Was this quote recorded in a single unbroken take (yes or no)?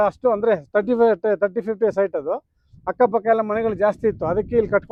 yes